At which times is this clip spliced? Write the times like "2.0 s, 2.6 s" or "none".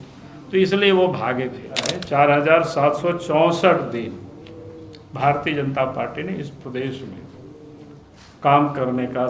1.9 s